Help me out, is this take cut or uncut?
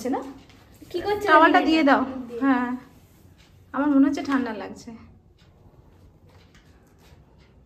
uncut